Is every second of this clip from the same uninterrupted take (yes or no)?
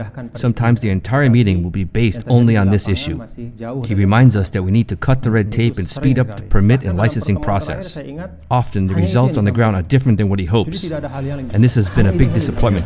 yes